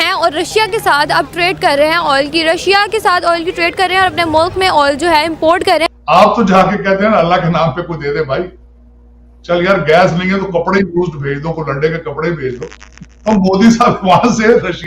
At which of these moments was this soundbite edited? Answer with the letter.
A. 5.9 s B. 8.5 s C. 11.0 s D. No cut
A